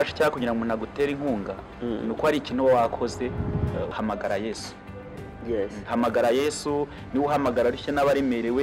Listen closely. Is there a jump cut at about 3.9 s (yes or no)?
yes